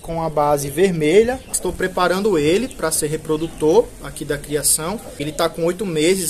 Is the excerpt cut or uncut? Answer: cut